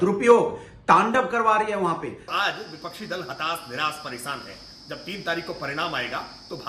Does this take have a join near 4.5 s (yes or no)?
no